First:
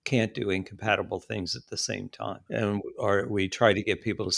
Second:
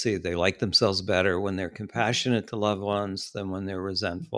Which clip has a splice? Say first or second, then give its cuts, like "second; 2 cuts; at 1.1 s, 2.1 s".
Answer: first; 1 cut; at 2.4 s